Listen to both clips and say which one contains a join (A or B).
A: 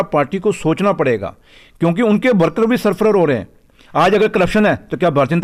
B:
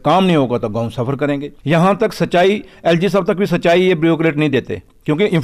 B